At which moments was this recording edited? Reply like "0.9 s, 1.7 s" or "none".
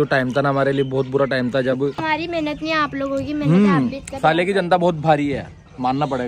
2.0 s